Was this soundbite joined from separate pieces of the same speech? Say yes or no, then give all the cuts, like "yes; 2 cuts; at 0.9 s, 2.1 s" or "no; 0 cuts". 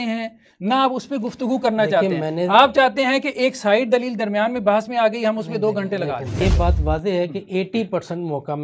yes; 1 cut; at 6.4 s